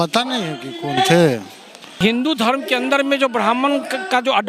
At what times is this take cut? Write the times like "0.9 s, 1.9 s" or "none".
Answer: 1.9 s